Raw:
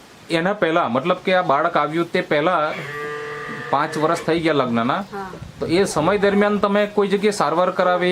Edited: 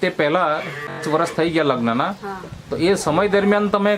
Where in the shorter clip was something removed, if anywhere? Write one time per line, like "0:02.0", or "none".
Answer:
0:01.0